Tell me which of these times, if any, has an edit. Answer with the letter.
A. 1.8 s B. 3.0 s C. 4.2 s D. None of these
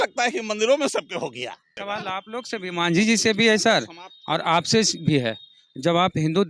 A